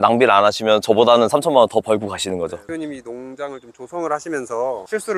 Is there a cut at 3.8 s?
no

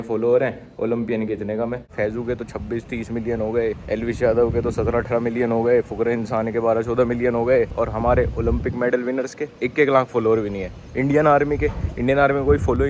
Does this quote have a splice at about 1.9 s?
yes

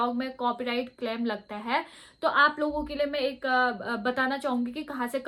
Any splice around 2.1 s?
no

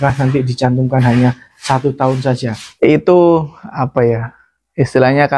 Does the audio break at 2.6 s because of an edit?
yes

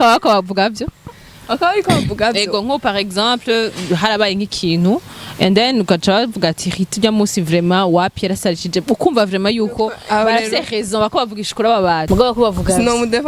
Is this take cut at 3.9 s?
no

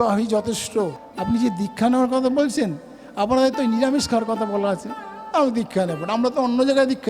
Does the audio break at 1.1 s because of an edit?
yes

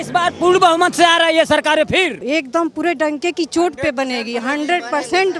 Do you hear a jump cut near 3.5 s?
no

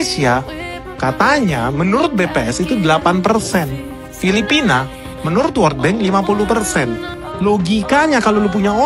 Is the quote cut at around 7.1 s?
yes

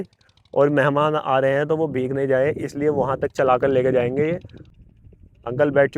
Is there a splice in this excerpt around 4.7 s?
yes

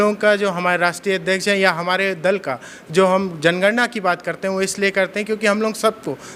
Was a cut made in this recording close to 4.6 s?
no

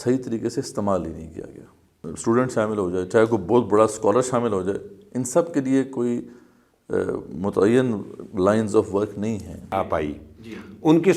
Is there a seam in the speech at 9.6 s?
yes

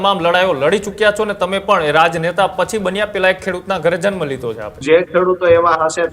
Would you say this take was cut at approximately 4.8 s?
yes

